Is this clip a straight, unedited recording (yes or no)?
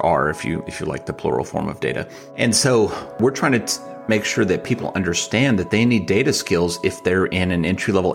no